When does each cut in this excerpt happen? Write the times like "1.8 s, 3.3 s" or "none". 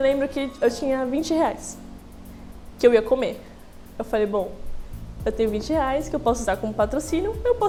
none